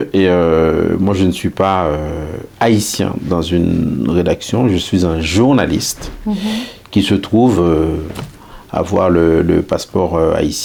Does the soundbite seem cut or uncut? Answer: uncut